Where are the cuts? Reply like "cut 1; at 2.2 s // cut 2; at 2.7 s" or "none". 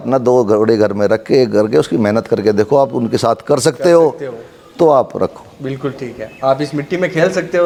none